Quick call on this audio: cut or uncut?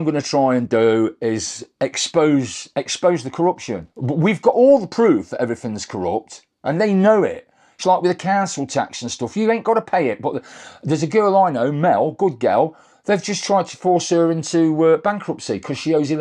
uncut